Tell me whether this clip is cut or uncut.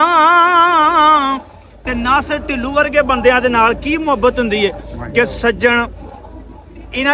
cut